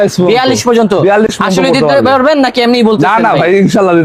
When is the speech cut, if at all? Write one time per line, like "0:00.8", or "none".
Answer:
none